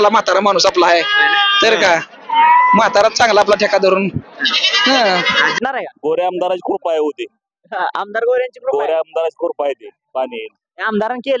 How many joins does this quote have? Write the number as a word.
one